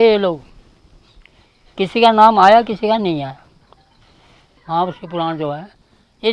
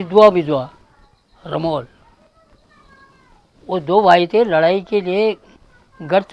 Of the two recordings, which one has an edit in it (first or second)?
first